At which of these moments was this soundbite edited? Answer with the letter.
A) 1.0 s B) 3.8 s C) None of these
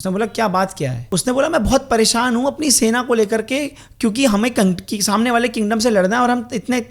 A